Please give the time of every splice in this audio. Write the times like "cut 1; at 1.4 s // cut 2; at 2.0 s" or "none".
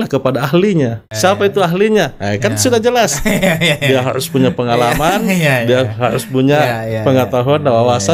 cut 1; at 1.1 s

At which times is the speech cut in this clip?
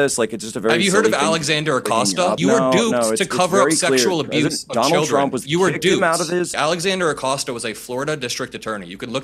cut 1; at 2.4 s // cut 2; at 6.5 s

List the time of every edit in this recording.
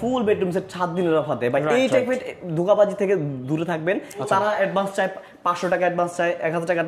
cut 1; at 4.3 s

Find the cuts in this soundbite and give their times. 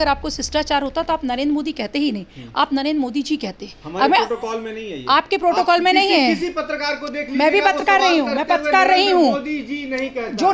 none

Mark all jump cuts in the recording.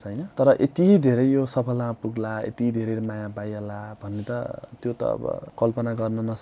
cut 1; at 5.5 s

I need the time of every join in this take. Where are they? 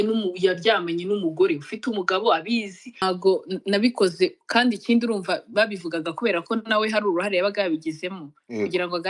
cut 1; at 3.0 s

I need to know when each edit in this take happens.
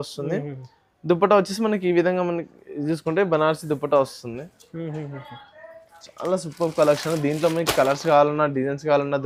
none

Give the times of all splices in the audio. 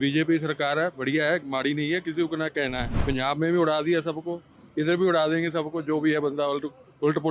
cut 1; at 2.9 s

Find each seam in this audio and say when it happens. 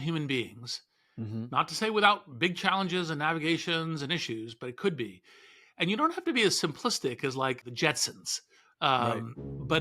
cut 1; at 7.6 s

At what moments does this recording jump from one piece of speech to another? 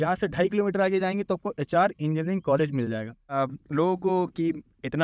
cut 1; at 3.4 s

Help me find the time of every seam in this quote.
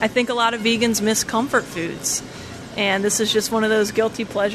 none

